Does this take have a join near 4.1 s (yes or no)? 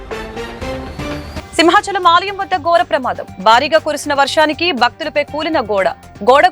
no